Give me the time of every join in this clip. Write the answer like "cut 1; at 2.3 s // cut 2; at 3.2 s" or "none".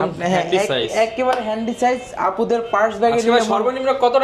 none